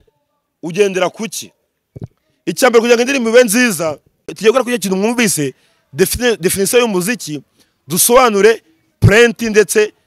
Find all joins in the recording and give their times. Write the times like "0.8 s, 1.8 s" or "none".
4.4 s